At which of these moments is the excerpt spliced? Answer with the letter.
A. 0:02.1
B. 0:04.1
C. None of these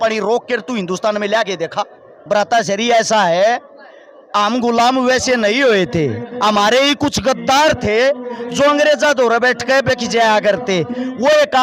A